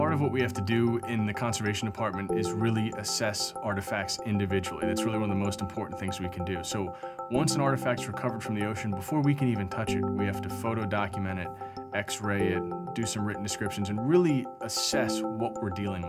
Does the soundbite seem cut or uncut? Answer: cut